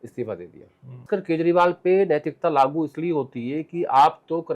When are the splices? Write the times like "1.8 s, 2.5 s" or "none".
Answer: 1.0 s